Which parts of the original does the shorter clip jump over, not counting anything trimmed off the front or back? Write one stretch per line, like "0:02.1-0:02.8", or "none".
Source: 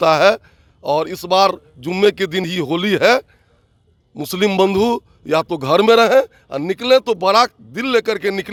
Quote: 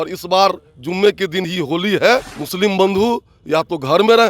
0:03.4-0:04.2

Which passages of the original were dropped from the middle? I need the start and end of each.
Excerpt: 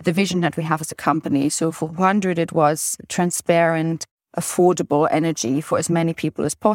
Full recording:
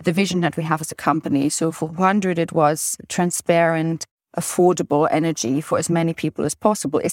none

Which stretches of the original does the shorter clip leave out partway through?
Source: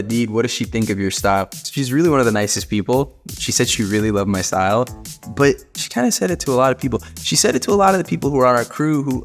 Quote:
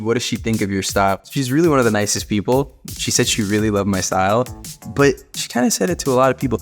0:01.5-0:01.7

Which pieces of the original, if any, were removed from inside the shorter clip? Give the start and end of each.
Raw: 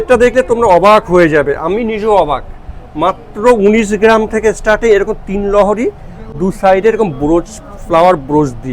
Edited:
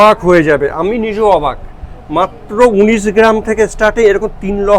none

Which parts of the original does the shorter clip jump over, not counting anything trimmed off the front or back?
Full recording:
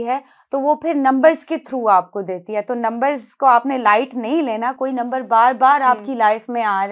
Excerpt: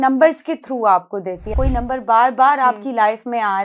0:02.5-0:04.7

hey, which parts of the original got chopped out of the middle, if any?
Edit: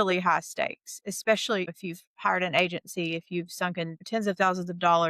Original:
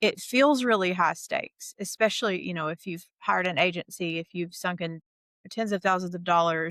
0:02.5-0:02.8
0:05.0-0:05.4

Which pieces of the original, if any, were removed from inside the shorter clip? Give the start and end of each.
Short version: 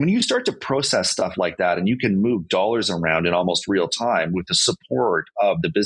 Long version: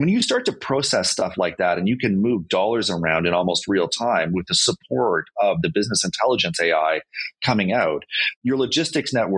none

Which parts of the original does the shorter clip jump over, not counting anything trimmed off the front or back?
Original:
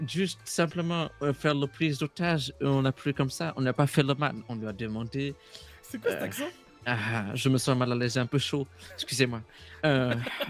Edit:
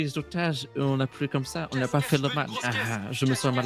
0:04.4-0:06.8

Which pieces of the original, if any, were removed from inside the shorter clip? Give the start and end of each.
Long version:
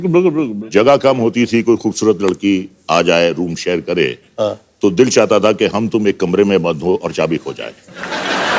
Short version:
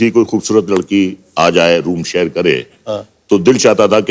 none

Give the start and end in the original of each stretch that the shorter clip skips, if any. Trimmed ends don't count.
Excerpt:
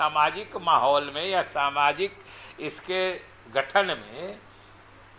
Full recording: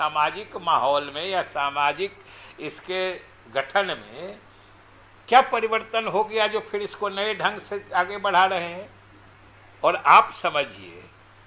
none

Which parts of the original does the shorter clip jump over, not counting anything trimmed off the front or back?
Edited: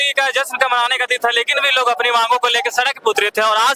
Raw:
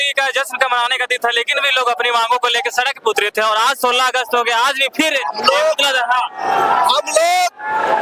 none

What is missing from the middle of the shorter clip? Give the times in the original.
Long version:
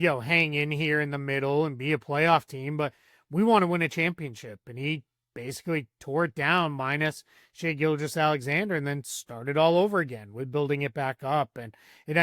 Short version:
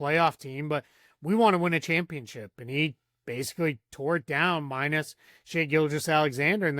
none

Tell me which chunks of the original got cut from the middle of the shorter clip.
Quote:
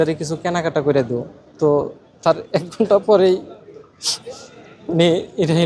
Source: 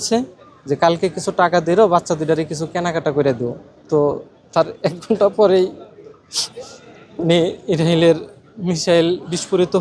none

